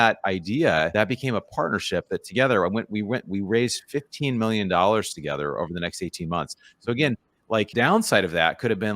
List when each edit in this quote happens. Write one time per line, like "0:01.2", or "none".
0:00.9
0:07.7